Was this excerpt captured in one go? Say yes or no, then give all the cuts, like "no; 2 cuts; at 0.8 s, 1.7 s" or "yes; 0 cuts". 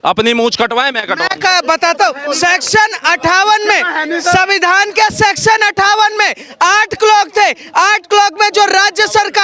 yes; 0 cuts